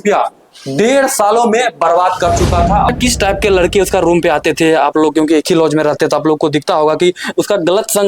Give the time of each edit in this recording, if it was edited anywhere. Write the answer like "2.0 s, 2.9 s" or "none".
2.9 s